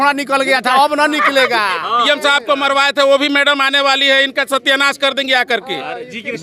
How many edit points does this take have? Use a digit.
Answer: 1